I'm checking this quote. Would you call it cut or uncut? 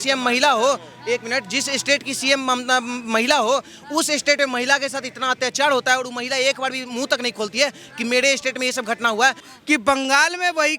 cut